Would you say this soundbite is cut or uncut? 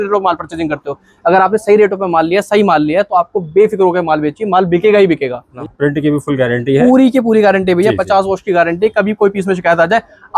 cut